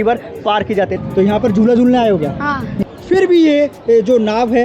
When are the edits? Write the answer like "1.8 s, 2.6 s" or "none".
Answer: 0.9 s, 2.7 s